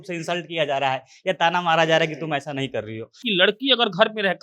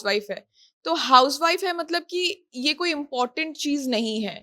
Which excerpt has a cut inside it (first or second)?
first